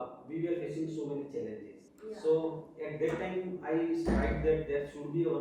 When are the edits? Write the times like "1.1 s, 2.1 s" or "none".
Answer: 1.8 s